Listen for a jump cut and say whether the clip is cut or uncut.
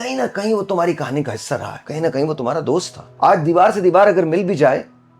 cut